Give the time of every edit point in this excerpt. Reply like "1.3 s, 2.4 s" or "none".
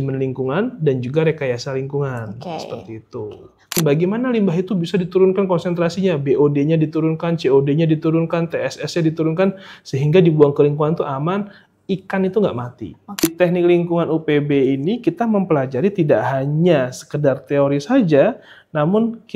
3.8 s, 13.2 s